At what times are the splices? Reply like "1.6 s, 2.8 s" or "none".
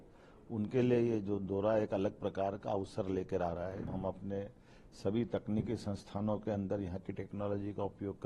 3.9 s